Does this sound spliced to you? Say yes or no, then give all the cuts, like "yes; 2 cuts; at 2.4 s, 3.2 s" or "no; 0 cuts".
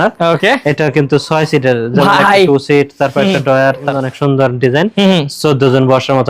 yes; 1 cut; at 3.9 s